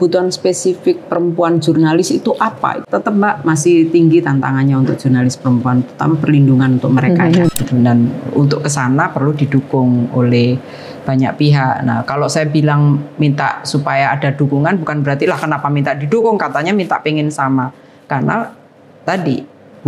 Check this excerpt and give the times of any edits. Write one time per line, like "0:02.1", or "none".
0:02.8
0:07.5

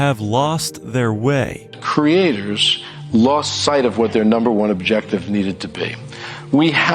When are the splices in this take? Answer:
0:01.1
0:04.6

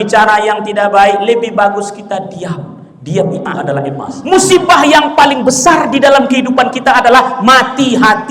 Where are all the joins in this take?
0:04.1

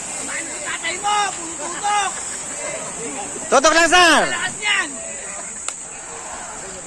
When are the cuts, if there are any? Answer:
none

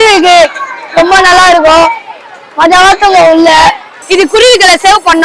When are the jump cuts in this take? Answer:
0:03.9

